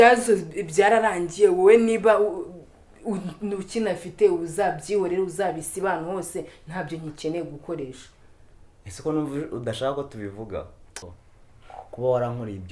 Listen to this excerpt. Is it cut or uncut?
cut